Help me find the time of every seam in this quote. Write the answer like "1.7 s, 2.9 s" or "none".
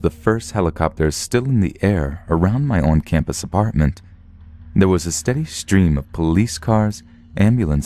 2.7 s

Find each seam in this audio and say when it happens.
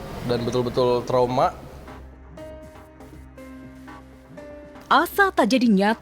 1.7 s, 4.5 s

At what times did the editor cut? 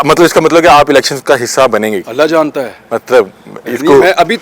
none

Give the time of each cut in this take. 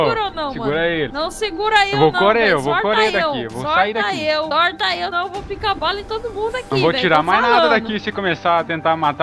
1.1 s, 4.9 s

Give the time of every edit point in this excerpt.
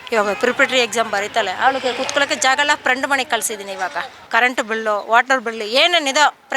4.2 s

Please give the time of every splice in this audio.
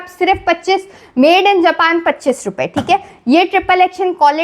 none

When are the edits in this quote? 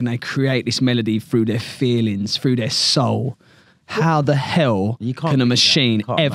none

